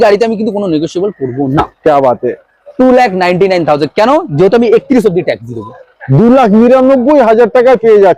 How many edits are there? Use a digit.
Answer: 0